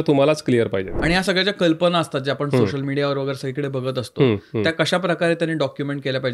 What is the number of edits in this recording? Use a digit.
1